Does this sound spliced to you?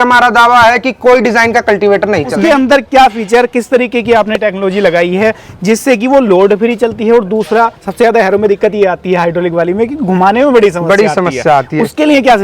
yes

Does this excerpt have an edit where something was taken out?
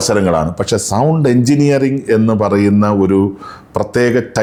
no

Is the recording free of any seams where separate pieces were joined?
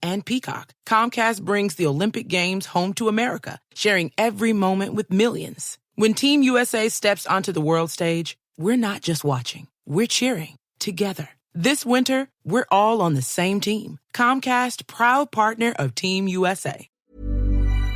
no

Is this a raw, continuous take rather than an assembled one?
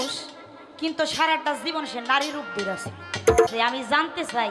no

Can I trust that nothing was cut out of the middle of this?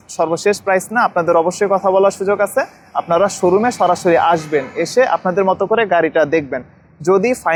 yes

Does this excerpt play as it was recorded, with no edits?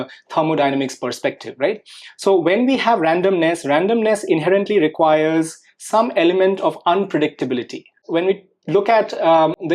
no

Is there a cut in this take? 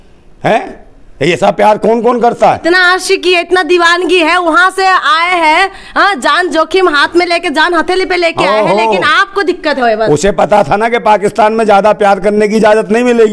no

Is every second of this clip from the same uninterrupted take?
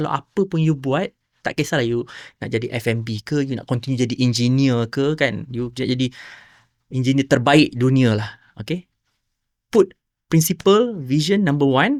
yes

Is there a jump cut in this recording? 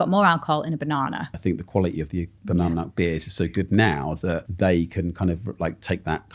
yes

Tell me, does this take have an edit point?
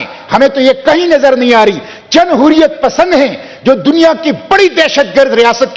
no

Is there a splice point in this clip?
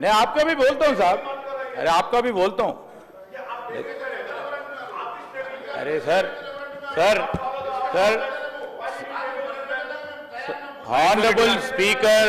no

